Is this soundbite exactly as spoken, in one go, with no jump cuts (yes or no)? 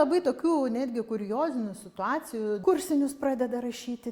no